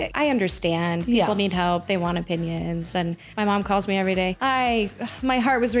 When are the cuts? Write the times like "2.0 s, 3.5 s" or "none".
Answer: 3.3 s